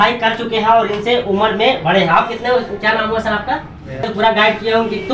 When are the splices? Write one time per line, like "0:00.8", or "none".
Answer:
0:04.1